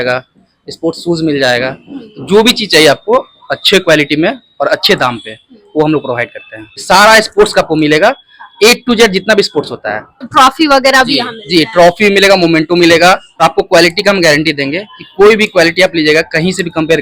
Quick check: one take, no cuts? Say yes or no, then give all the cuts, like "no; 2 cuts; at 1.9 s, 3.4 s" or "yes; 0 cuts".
no; 3 cuts; at 6.8 s, 10.2 s, 13.4 s